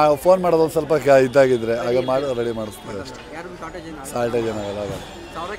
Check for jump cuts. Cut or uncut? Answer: uncut